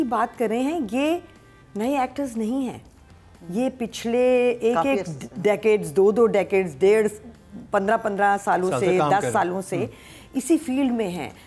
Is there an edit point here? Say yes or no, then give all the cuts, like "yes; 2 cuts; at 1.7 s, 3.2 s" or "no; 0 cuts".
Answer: no; 0 cuts